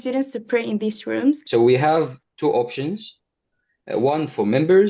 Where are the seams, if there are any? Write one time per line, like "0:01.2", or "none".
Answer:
0:01.4

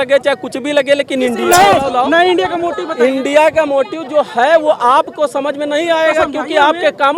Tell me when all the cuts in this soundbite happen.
0:01.4

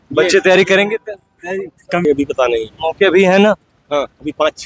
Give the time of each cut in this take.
0:02.1

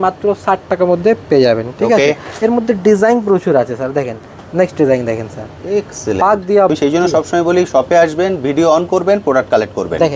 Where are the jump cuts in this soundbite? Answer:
0:06.7

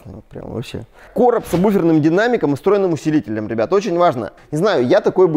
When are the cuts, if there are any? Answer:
0:01.0
0:04.4

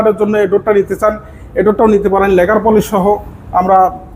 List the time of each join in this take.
none

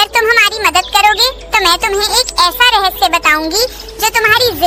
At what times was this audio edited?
none

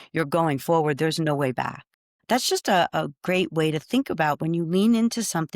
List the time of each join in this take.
0:01.9

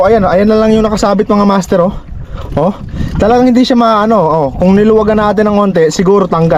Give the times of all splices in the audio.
none

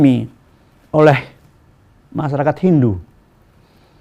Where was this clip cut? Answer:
none

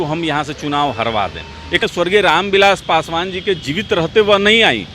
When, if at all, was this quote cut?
0:01.9

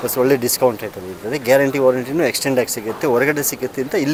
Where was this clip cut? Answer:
none

